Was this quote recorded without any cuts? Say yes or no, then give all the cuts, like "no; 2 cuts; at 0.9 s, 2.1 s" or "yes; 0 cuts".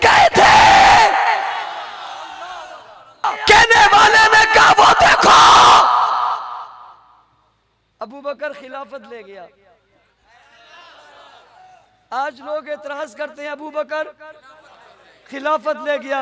no; 1 cut; at 3.3 s